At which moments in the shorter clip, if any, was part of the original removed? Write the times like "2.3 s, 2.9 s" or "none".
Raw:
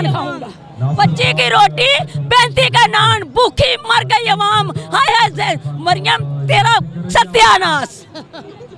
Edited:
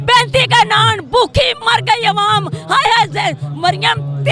none